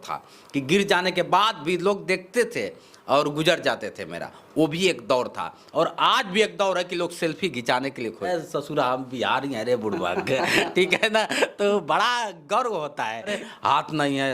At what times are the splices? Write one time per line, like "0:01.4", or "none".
0:08.3
0:13.4